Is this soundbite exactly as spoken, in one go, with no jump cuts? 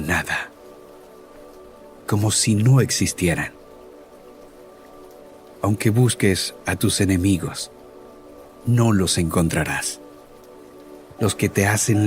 yes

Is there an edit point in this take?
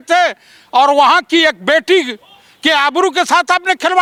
no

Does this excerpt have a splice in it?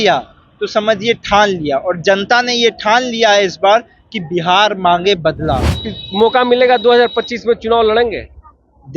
yes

